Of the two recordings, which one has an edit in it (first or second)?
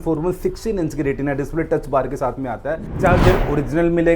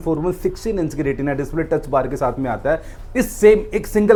first